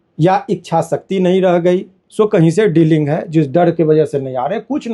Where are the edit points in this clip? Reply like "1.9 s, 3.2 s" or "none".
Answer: 2.0 s